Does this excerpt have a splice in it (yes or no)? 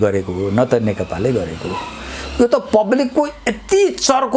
no